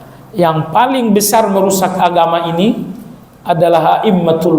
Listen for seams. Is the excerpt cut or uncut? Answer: uncut